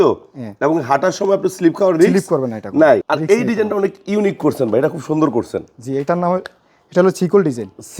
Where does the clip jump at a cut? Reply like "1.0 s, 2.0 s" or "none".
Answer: 3.0 s